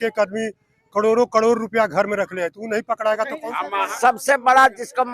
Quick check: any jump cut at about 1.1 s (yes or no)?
no